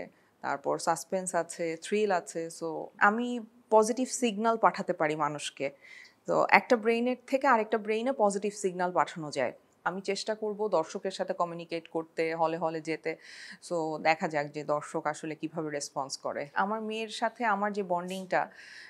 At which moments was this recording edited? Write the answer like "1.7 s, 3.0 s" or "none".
2.9 s, 9.7 s, 16.5 s